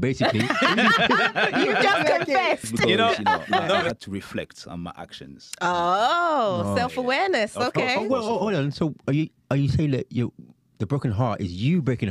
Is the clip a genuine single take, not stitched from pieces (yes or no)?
no